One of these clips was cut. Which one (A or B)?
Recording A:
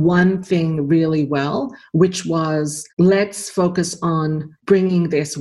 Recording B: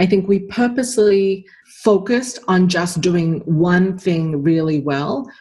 A